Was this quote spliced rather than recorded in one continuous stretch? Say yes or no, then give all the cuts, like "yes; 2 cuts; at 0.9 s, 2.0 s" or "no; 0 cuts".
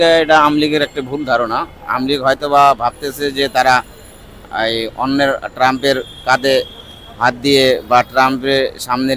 no; 0 cuts